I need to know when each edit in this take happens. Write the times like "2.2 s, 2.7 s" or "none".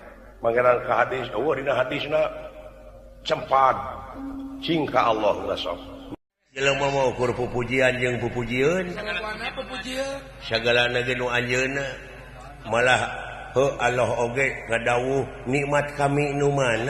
5.9 s